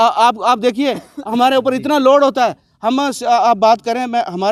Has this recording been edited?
no; 0 cuts

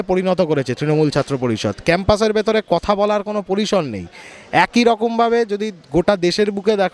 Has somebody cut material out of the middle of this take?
no; 0 cuts

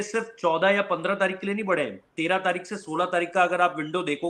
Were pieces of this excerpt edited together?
no; 0 cuts

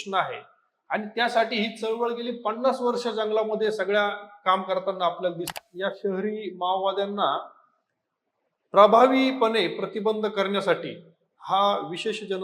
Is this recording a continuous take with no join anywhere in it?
no; 1 cut; at 5.5 s

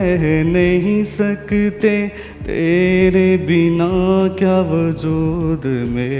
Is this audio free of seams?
yes; 0 cuts

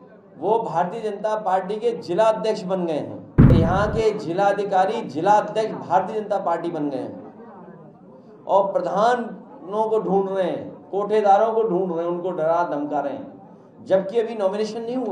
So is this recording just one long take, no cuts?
no; 1 cut; at 3.5 s

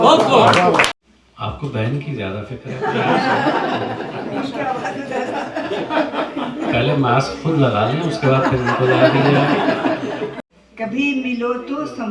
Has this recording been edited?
yes; 2 cuts; at 1.0 s, 10.5 s

